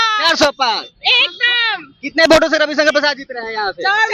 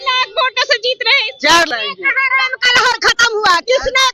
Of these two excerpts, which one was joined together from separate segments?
second; 1 cut; at 1.8 s

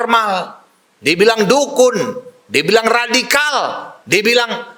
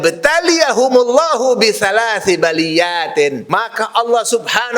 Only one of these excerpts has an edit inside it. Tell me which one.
second; 1 cut; at 3.4 s

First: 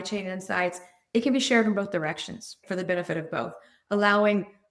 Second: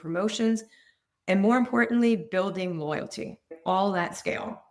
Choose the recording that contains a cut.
second; 1 cut; at 3.5 s

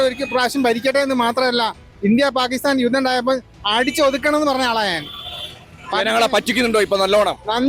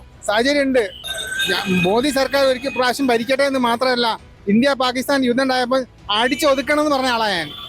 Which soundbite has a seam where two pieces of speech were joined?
second; 1 cut; at 1.0 s

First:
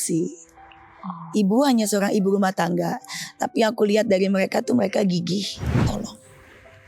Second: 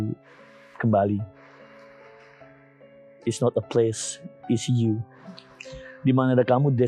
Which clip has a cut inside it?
first; 1 cut; at 5.7 s

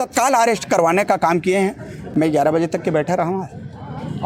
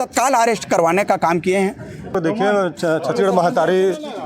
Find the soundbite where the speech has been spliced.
second; 1 cut; at 2.1 s

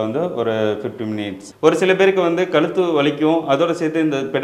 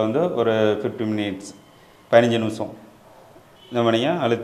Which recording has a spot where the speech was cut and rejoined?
first; 1 cut; at 1.4 s

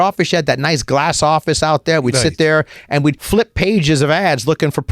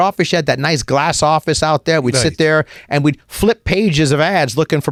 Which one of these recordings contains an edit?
first; 1 cut; at 3.2 s

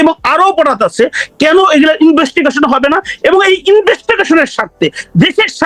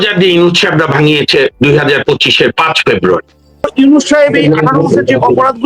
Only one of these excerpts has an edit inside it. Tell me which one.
second; 1 cut; at 3.6 s

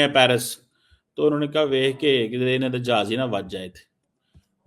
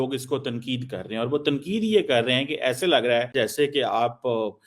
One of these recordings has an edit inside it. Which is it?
second; 1 cut; at 3.3 s

